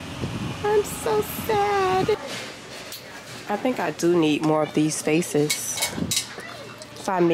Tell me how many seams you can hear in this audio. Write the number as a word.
one